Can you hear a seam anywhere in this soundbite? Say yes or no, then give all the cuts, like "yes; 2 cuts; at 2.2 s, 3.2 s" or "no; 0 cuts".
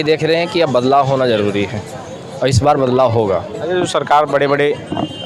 no; 0 cuts